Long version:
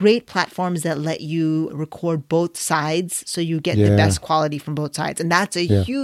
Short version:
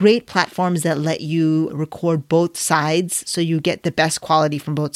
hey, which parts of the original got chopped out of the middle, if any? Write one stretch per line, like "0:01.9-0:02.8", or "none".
none